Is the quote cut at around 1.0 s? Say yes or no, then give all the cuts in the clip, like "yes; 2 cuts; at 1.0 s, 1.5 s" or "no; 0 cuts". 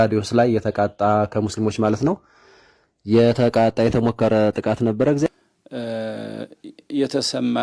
no; 1 cut; at 5.3 s